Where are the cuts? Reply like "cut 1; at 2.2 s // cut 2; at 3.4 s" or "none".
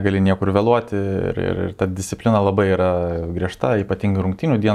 none